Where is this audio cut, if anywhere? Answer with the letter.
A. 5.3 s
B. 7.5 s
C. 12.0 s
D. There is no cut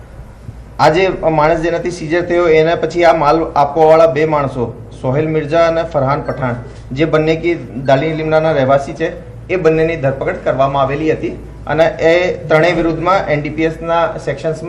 C